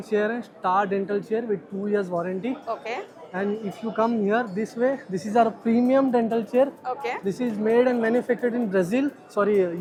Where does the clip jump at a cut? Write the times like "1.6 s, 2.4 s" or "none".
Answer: none

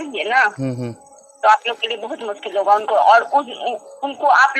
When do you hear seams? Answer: none

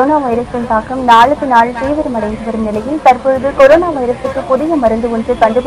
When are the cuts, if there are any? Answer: none

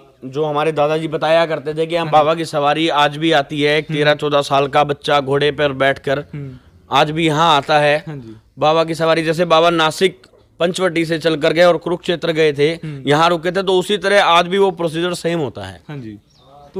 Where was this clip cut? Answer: none

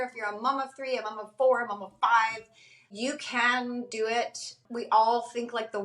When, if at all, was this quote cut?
2.9 s, 4.6 s

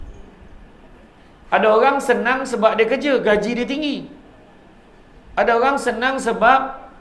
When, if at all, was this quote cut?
none

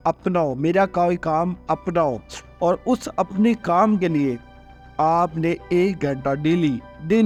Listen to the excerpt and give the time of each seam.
none

